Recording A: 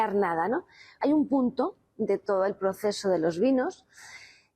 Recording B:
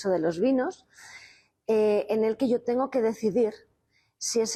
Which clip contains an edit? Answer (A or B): A